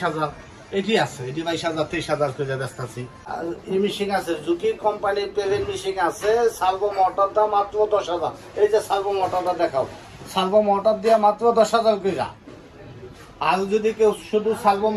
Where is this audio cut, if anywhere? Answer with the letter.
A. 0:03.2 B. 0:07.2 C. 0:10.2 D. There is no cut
A